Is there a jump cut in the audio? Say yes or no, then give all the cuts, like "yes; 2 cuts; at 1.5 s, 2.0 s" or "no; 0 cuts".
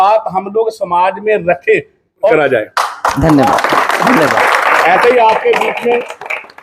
yes; 1 cut; at 2.3 s